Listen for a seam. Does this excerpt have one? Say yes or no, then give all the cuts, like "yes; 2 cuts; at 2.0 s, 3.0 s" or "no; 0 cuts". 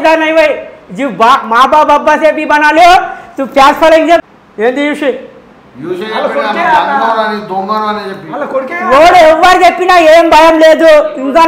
yes; 1 cut; at 4.2 s